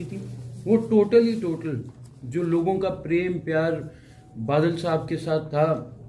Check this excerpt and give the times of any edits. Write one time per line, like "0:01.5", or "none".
none